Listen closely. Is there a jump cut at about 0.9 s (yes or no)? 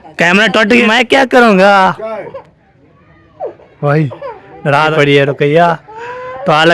yes